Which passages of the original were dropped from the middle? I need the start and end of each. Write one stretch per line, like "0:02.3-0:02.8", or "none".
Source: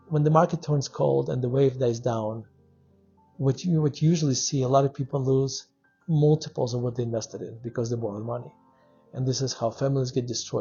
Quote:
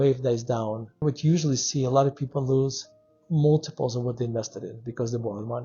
0:02.6-0:03.8